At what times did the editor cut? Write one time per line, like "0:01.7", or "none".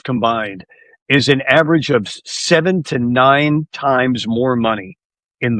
none